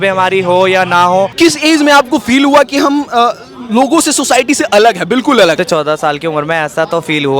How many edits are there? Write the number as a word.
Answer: two